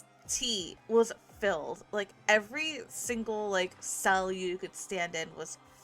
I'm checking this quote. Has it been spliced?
no; 0 cuts

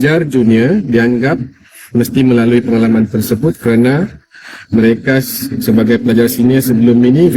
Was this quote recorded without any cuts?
yes; 0 cuts

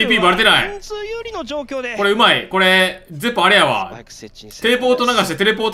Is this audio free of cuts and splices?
yes; 0 cuts

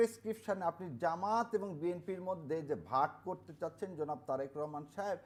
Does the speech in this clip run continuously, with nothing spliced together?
yes; 0 cuts

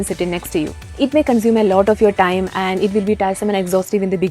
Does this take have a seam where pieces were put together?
yes; 1 cut; at 1.0 s

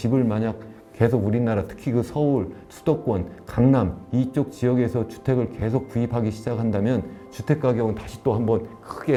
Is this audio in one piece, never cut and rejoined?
yes; 0 cuts

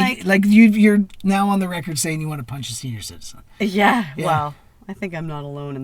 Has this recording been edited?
no; 0 cuts

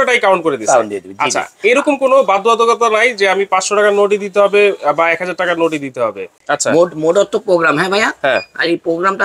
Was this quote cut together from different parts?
yes; 1 cut; at 6.4 s

